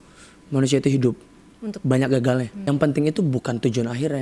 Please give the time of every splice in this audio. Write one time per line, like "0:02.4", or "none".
0:02.7